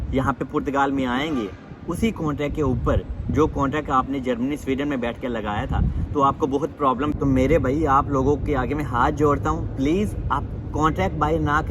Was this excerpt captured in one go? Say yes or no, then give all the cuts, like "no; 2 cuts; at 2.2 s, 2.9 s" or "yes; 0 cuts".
no; 1 cut; at 7.1 s